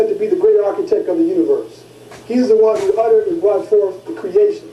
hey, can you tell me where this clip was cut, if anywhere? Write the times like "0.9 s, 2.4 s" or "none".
3.0 s